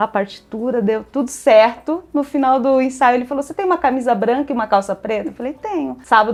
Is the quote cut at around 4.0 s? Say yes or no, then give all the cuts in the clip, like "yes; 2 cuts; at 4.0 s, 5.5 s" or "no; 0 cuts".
no; 0 cuts